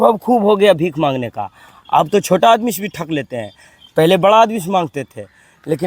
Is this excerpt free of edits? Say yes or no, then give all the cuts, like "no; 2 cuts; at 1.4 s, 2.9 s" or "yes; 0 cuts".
yes; 0 cuts